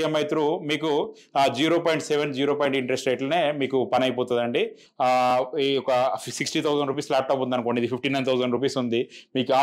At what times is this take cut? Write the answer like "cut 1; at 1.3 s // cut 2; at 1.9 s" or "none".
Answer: cut 1; at 4.8 s